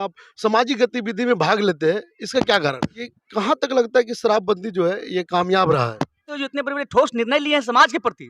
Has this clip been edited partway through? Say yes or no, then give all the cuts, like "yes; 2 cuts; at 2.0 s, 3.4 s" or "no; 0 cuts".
yes; 2 cuts; at 3.0 s, 6.4 s